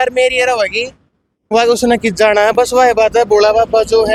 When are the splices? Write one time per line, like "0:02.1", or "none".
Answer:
none